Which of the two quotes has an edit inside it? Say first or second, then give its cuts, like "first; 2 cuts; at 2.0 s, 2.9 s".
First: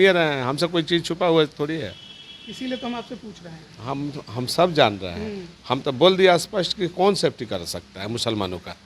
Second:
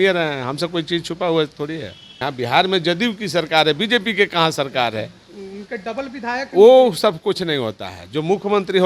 second; 1 cut; at 2.2 s